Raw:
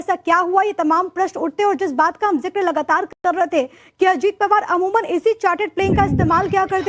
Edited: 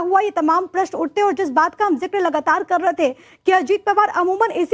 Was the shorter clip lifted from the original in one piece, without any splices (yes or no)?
no